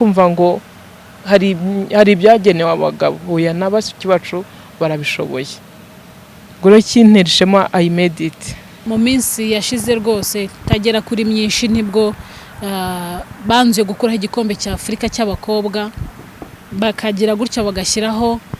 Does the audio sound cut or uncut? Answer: cut